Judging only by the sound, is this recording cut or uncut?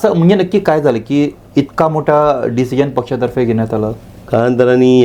uncut